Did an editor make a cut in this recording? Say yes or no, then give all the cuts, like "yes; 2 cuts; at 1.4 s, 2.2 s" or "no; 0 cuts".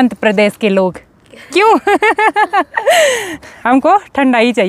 no; 0 cuts